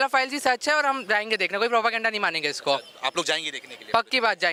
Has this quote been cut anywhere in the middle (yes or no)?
no